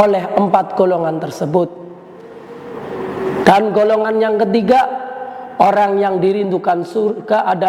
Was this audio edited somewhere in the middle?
yes; 1 cut; at 3.4 s

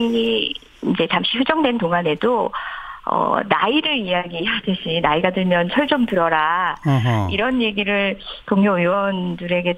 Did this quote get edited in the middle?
no; 0 cuts

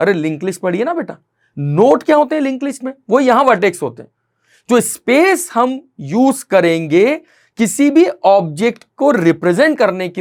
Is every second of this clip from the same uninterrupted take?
yes; 0 cuts

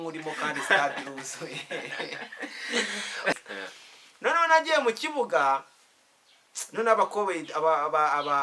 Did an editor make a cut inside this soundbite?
yes; 1 cut; at 3.3 s

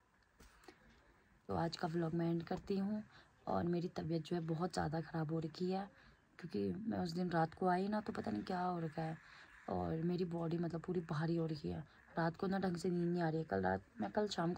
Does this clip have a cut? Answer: no; 0 cuts

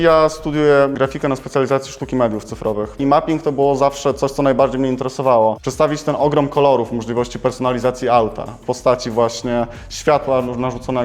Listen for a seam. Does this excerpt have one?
yes; 3 cuts; at 0.9 s, 3.0 s, 5.6 s

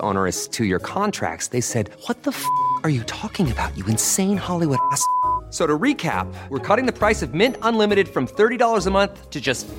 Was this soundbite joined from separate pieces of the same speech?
no; 0 cuts

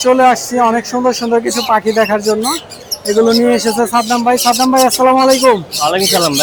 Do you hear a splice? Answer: no; 0 cuts

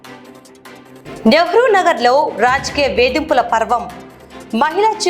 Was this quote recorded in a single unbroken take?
no; 1 cut; at 1.0 s

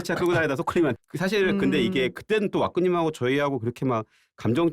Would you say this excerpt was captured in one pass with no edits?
no; 1 cut; at 1.0 s

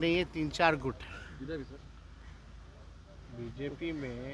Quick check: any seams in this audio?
no; 0 cuts

